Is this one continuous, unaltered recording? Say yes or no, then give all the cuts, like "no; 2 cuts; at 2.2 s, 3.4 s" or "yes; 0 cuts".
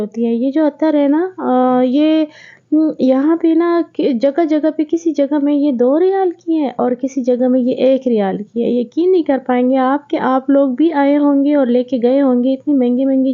yes; 0 cuts